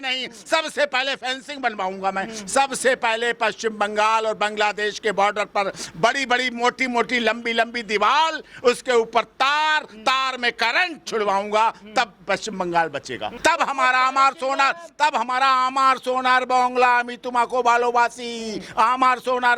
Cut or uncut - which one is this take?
cut